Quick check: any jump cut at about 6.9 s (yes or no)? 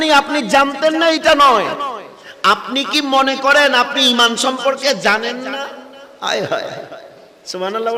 no